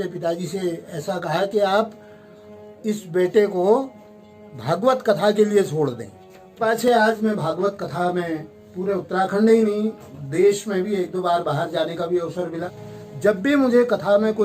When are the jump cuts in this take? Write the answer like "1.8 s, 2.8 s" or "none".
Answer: 6.6 s, 12.6 s